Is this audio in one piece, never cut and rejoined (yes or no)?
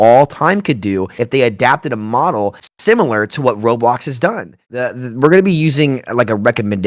no